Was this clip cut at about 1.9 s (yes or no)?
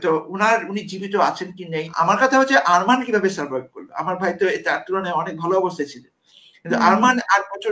yes